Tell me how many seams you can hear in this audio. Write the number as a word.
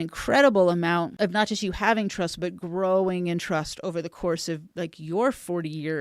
one